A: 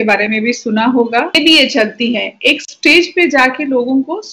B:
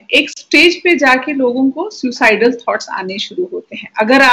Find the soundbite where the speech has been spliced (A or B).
A